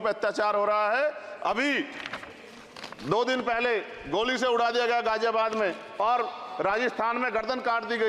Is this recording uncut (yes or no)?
yes